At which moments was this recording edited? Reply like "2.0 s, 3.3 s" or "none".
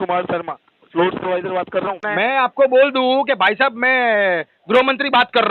2.0 s